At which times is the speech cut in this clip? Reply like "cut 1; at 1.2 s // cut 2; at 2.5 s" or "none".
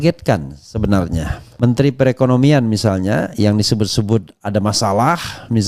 none